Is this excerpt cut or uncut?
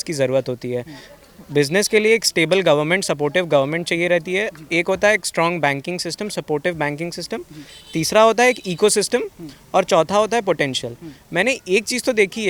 uncut